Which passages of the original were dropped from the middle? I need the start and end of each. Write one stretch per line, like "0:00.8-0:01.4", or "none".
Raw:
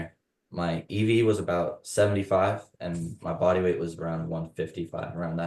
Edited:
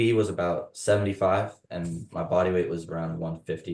none